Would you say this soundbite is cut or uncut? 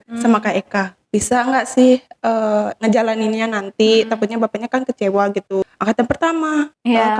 cut